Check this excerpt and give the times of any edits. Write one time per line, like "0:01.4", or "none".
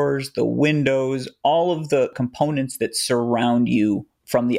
none